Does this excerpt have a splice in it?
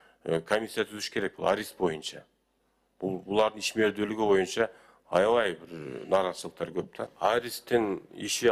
yes; 1 cut; at 7.0 s

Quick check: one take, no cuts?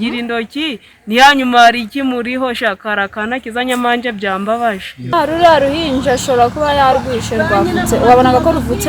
no; 1 cut; at 5.1 s

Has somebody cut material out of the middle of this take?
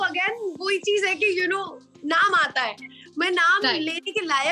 no; 0 cuts

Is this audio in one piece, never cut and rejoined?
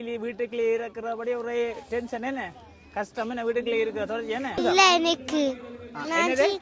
no; 1 cut; at 4.5 s

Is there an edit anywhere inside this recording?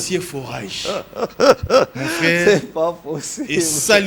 no; 0 cuts

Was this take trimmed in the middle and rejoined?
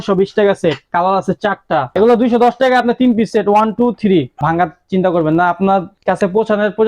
yes; 2 cuts; at 1.9 s, 4.4 s

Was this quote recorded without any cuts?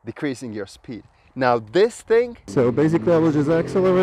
no; 1 cut; at 2.4 s

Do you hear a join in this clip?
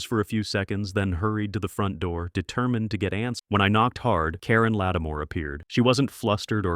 yes; 1 cut; at 3.4 s

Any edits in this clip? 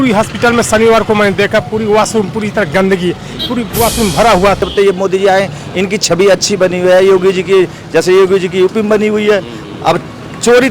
yes; 1 cut; at 4.6 s

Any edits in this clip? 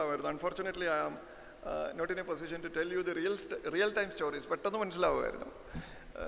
no; 0 cuts

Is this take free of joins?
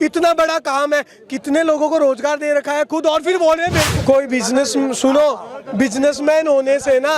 no; 1 cut; at 3.9 s

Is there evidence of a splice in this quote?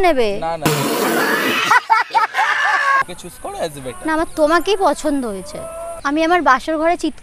yes; 1 cut; at 3.0 s

